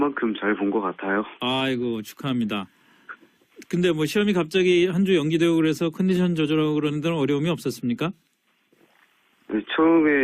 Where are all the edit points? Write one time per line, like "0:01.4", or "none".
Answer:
0:04.8